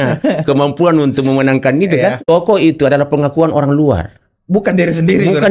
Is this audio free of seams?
no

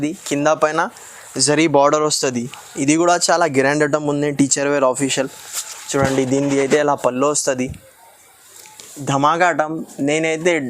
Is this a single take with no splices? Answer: no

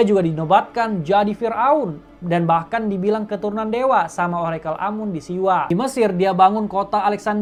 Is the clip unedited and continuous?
yes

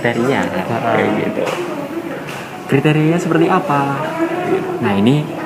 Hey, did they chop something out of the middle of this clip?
no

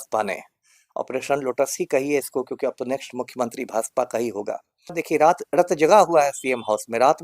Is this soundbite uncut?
no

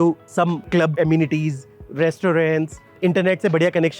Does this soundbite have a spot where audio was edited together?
yes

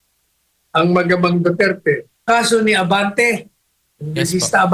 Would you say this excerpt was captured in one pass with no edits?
no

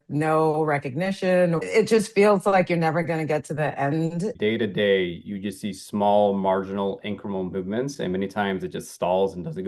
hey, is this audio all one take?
no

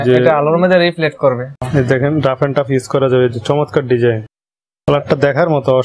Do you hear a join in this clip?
yes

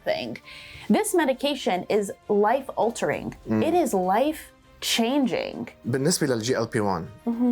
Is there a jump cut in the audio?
yes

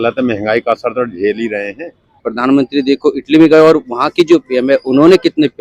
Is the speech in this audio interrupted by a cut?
yes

